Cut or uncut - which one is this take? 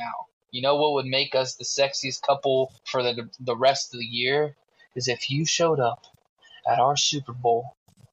cut